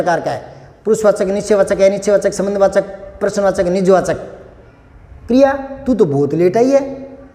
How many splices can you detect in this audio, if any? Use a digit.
0